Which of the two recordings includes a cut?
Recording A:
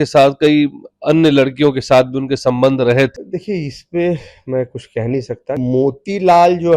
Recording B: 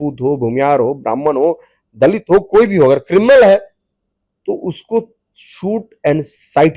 A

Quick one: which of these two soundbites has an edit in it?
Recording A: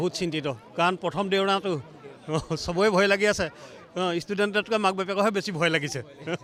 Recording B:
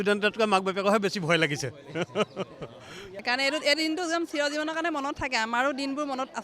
B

